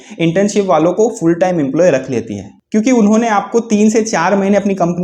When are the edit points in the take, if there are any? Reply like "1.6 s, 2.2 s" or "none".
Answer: none